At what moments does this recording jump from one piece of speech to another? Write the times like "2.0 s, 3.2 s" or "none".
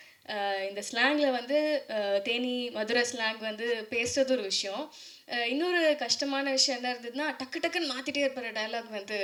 none